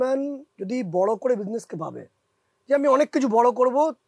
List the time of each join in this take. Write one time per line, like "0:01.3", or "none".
none